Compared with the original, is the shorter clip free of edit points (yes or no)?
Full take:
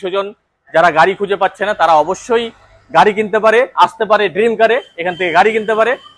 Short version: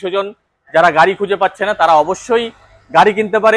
yes